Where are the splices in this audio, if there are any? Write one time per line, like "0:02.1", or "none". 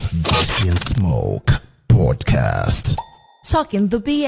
none